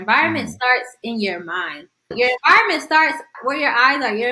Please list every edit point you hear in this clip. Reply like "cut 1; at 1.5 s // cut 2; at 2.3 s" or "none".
cut 1; at 2.1 s // cut 2; at 3.3 s